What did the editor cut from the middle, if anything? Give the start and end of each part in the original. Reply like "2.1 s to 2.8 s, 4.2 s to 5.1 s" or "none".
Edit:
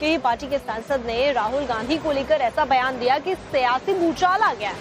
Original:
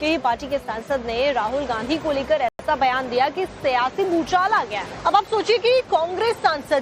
2.5 s to 2.6 s